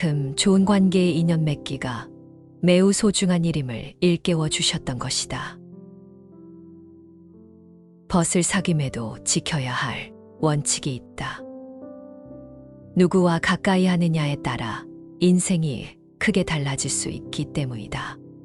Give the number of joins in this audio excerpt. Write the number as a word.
zero